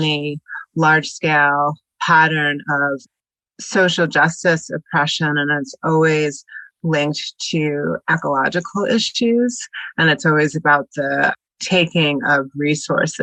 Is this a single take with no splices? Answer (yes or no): yes